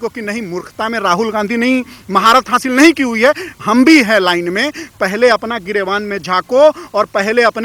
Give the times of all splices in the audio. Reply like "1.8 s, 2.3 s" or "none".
none